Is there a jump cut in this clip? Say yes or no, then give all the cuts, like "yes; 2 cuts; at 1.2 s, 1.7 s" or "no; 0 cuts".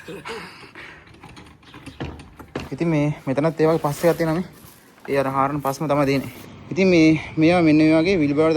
yes; 2 cuts; at 2.7 s, 6.4 s